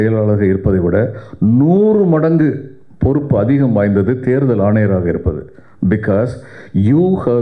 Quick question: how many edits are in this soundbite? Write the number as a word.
zero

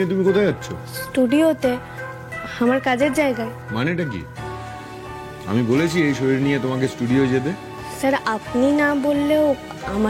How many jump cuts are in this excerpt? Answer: zero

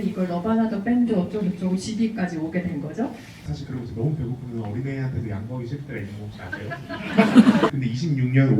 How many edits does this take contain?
two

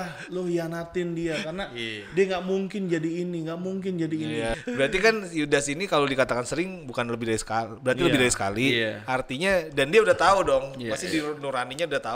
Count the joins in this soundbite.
one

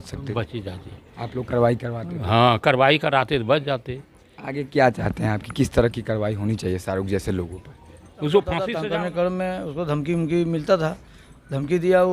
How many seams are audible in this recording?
one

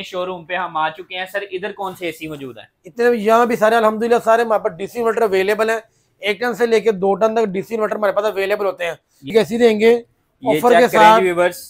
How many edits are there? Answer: one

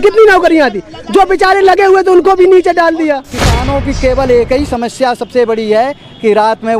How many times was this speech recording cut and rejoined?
one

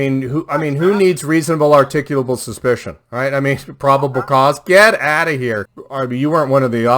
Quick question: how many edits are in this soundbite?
one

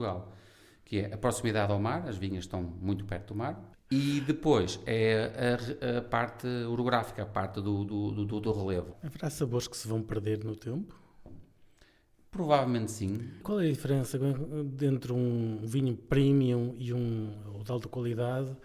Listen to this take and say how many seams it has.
three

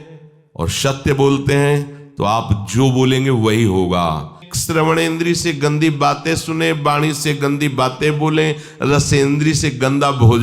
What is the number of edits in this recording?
one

